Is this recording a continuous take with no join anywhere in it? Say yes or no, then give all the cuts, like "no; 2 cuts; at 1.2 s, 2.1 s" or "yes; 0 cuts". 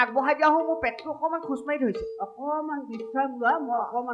yes; 0 cuts